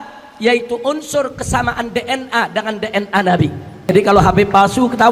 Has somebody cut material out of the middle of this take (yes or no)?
yes